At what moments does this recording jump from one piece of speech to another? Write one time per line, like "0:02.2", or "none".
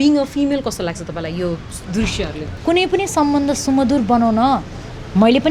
0:02.5